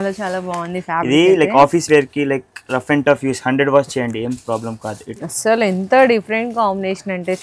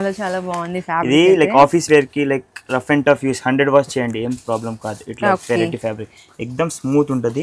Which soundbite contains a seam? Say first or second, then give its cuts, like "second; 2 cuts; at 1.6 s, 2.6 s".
first; 1 cut; at 5.1 s